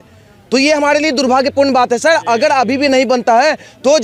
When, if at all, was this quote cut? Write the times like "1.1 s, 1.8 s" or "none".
none